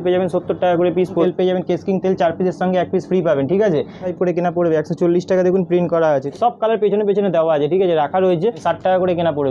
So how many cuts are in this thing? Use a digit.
4